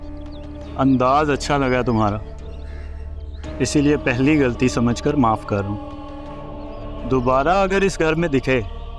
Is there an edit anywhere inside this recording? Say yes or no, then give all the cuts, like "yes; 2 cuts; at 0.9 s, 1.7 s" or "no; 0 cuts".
no; 0 cuts